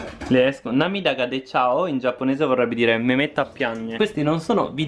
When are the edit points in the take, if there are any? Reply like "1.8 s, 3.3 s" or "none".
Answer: 4.0 s